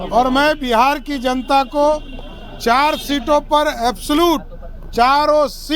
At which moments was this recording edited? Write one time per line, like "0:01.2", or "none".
none

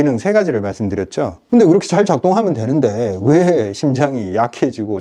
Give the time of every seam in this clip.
0:01.4

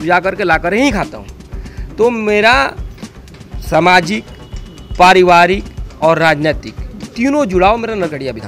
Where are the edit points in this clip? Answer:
none

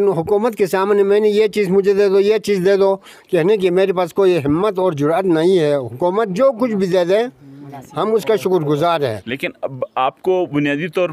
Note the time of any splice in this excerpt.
none

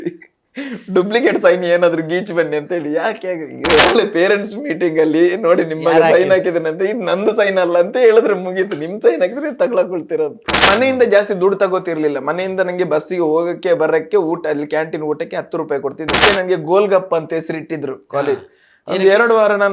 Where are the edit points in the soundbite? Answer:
0:03.8
0:10.6
0:16.2

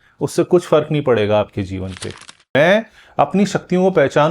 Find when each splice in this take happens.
0:02.2

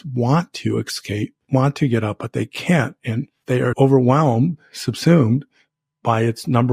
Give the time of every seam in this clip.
0:01.4
0:03.6

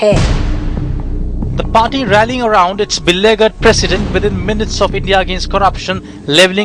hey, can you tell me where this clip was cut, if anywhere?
none

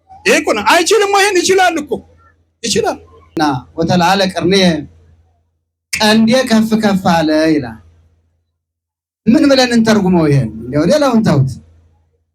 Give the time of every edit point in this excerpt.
0:03.4

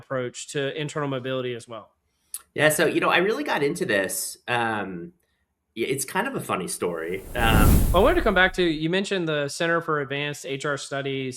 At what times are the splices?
0:07.8

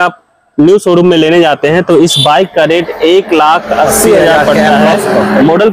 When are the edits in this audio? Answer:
none

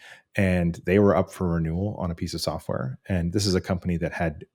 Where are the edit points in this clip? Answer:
none

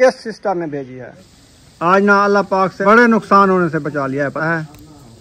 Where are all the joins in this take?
0:00.8
0:02.8
0:04.5

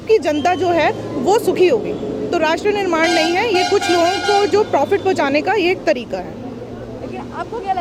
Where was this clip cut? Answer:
none

